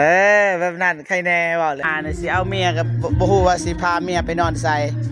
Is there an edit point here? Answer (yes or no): yes